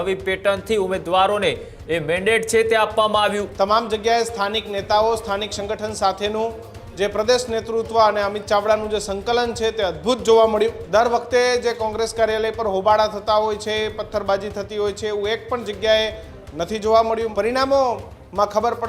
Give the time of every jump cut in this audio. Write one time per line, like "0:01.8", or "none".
0:03.4
0:10.8
0:17.3